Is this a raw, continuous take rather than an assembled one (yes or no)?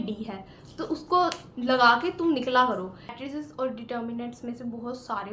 no